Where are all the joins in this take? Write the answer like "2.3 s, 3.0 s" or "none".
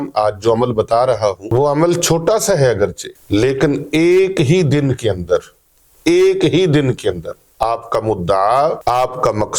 1.4 s, 3.1 s, 8.8 s

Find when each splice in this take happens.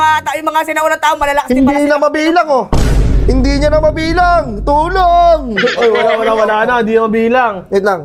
none

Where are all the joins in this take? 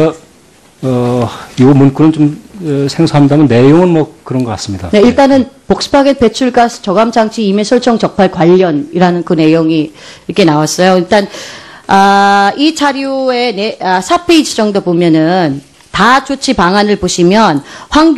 7.6 s

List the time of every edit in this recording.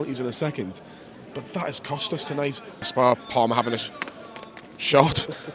2.9 s

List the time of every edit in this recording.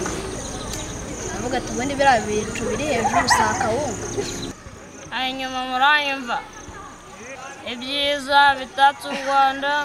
4.5 s, 7.3 s

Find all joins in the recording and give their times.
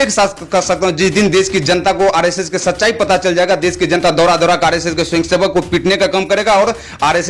none

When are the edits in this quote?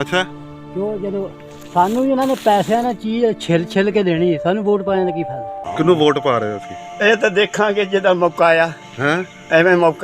5.7 s

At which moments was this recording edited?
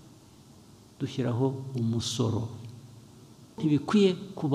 3.6 s

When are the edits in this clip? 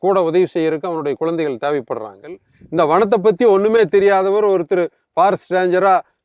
2.5 s

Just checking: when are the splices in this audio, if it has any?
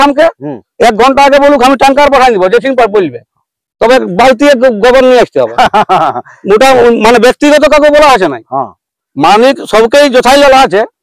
none

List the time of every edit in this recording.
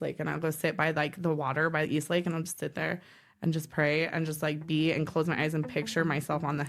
none

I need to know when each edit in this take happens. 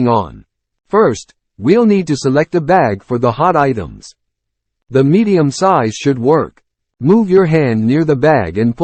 none

